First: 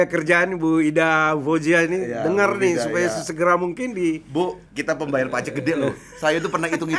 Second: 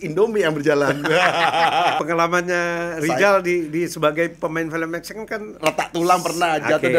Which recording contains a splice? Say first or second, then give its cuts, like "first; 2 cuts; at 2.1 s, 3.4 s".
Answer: second; 1 cut; at 2.0 s